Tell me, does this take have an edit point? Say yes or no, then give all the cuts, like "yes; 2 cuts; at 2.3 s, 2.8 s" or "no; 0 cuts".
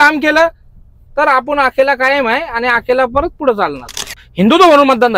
yes; 1 cut; at 4.2 s